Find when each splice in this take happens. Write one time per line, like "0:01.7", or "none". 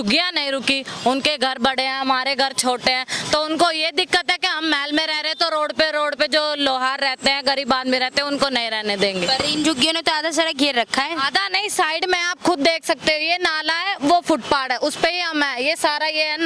none

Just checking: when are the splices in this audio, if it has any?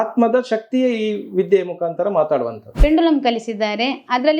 0:02.7

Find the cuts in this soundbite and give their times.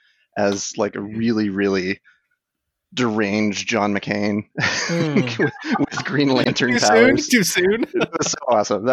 none

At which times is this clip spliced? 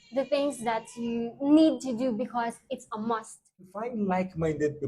0:03.8

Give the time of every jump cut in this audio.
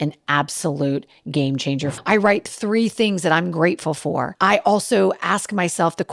0:01.9
0:04.3

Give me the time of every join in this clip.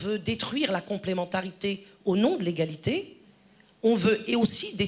none

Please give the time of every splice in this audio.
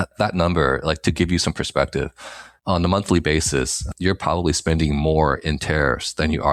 none

